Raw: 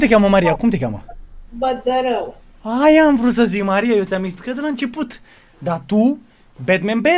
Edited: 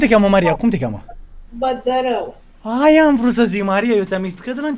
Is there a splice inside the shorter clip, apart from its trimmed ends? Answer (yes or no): no